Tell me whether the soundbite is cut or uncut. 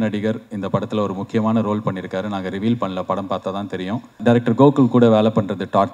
cut